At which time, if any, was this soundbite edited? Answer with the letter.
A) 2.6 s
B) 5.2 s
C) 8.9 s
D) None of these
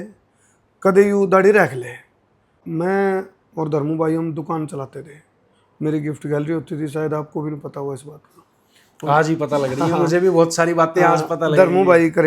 A